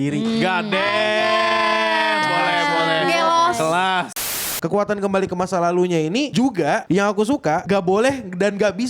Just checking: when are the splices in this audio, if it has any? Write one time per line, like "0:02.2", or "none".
0:04.3
0:06.3
0:07.6